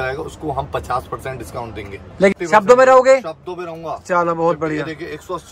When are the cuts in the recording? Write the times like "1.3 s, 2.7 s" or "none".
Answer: 2.3 s